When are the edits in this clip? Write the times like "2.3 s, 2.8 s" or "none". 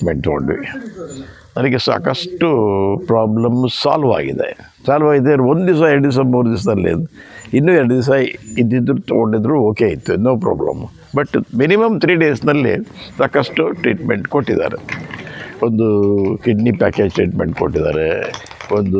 none